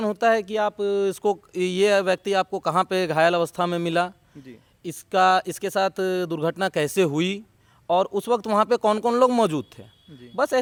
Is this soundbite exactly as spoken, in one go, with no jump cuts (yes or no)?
yes